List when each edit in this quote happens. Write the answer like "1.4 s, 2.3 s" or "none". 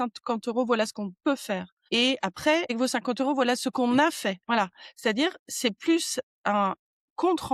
none